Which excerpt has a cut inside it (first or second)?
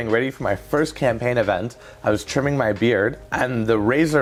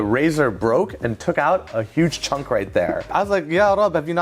second